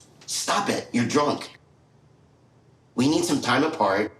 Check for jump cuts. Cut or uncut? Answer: cut